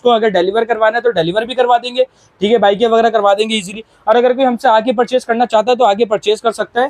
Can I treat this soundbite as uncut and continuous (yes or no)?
yes